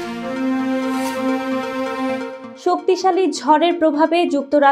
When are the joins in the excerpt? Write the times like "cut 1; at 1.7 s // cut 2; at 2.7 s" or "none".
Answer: cut 1; at 2.4 s